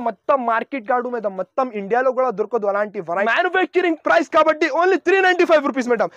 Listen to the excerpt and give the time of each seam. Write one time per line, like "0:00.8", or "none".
0:03.3